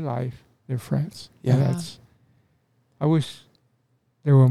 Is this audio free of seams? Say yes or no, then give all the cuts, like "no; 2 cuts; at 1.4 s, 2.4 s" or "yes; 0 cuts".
yes; 0 cuts